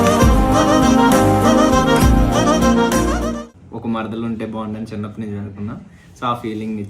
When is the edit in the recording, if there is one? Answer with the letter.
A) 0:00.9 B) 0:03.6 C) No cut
B